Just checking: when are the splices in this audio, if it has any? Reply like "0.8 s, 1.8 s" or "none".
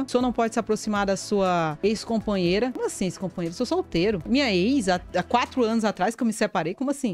none